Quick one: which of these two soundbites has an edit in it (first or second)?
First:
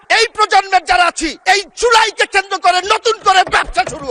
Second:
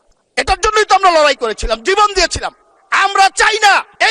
second